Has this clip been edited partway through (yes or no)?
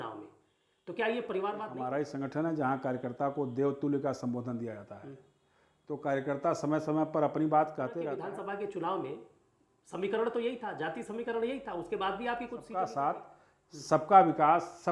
yes